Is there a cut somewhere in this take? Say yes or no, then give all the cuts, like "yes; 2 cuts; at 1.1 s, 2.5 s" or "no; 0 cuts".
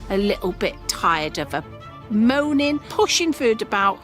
yes; 1 cut; at 2.9 s